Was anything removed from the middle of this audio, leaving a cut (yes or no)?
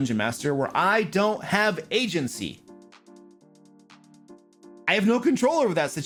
no